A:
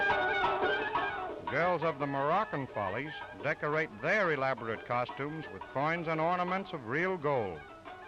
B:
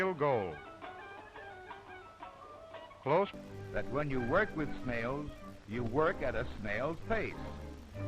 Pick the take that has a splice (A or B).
B